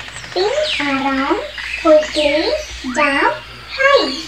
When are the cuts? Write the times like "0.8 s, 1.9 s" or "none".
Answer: none